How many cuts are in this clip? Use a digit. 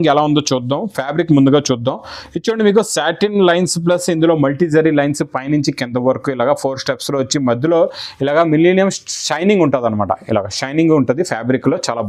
0